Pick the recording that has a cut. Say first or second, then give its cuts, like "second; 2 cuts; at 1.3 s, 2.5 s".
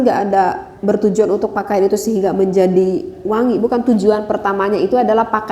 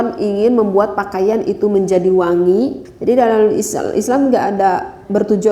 second; 1 cut; at 2.9 s